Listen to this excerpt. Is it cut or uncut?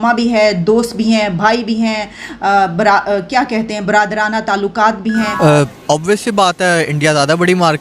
cut